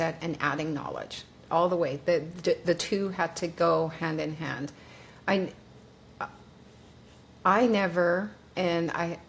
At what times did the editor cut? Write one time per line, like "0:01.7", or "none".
none